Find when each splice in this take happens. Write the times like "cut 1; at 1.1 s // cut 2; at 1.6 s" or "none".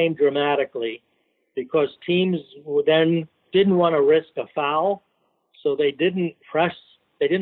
cut 1; at 3.4 s